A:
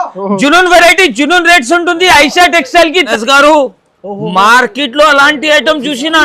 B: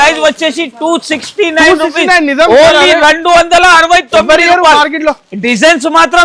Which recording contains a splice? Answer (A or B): A